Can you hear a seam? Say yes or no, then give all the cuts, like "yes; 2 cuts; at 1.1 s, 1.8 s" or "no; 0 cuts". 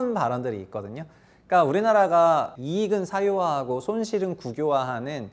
yes; 1 cut; at 2.6 s